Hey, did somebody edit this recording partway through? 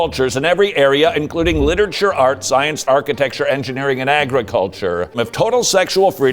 yes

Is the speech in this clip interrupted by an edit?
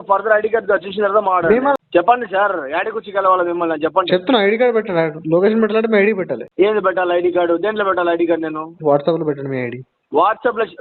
yes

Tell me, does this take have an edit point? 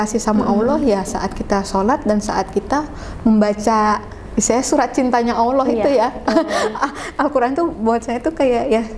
no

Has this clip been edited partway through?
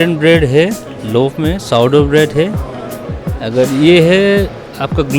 no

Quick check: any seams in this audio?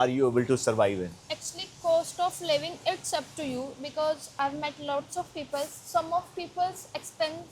no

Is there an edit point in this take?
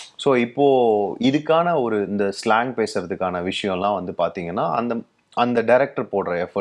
no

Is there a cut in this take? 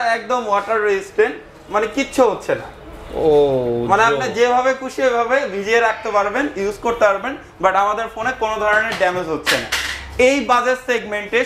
no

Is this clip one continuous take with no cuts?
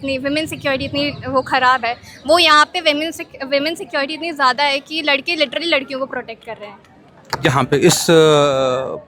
yes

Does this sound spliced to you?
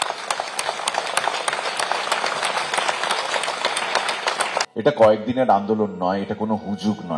yes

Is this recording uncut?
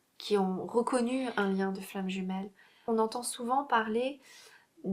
no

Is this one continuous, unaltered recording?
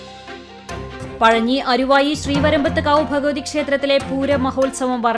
yes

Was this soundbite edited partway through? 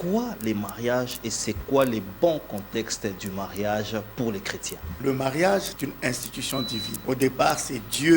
yes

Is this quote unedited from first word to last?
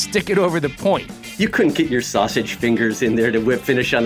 no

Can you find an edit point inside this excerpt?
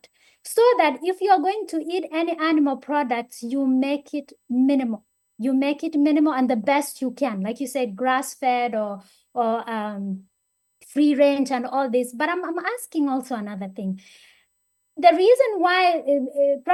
no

